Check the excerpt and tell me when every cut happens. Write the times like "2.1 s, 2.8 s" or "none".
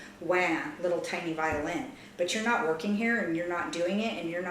none